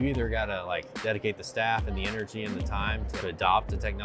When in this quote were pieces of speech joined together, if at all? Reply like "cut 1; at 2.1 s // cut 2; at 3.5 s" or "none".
cut 1; at 0.9 s // cut 2; at 3.1 s